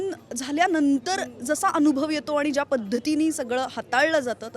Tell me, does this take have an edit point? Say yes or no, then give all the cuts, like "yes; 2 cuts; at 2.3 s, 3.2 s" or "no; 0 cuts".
no; 0 cuts